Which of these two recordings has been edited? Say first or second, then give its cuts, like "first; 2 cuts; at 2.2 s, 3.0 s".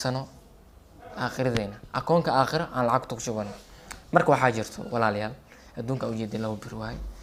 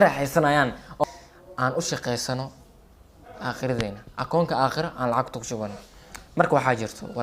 second; 1 cut; at 1.0 s